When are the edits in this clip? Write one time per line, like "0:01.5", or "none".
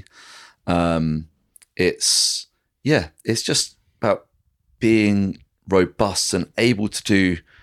none